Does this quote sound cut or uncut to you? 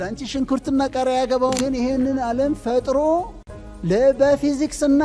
cut